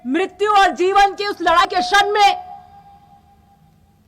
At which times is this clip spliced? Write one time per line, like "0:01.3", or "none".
0:01.6